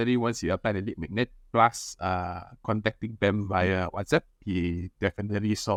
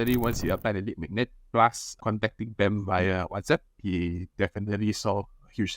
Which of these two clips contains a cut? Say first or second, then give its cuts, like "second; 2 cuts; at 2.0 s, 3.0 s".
second; 1 cut; at 1.9 s